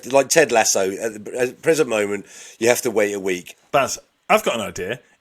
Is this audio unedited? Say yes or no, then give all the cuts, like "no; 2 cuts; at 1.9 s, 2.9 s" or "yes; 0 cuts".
no; 1 cut; at 3.5 s